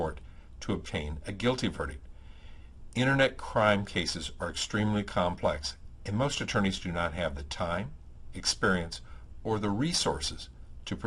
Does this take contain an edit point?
no; 0 cuts

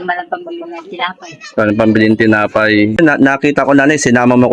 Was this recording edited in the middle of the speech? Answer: yes; 1 cut; at 3.0 s

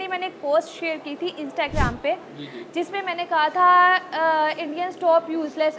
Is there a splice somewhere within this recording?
no; 0 cuts

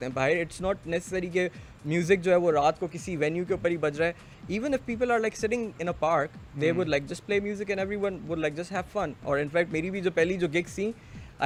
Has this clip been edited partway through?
no; 0 cuts

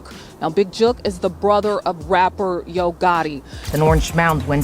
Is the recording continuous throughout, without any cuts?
no; 1 cut; at 3.6 s

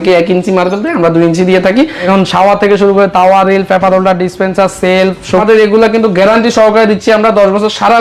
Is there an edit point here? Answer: yes; 2 cuts; at 2.1 s, 5.4 s

